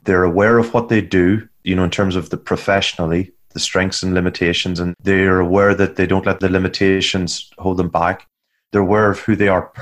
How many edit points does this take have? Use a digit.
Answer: 3